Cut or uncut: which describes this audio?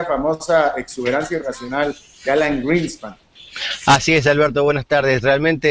cut